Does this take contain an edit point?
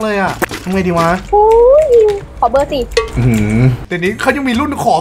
yes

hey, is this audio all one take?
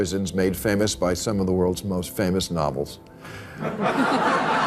yes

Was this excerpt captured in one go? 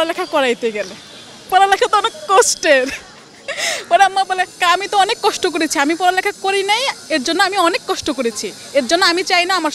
yes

